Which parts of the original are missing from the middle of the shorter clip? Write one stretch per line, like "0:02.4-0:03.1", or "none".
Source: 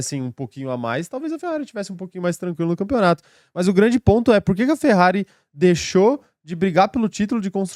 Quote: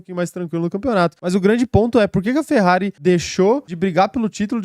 0:03.2-0:03.5
0:05.3-0:05.5
0:06.2-0:06.5